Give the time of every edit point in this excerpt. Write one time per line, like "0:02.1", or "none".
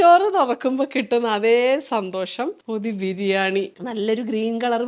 none